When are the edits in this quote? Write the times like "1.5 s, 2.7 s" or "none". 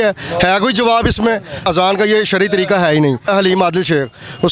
1.6 s, 3.3 s